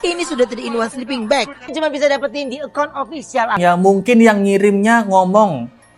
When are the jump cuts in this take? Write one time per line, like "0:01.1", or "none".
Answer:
0:01.7
0:03.6